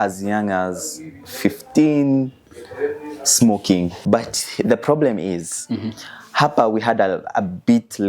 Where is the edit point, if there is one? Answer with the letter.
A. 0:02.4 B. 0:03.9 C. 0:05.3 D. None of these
B